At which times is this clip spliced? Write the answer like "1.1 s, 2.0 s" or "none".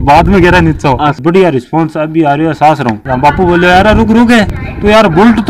1.2 s, 2.9 s